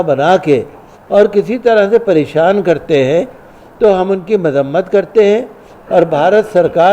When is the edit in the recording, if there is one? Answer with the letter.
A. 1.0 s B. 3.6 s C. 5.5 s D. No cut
D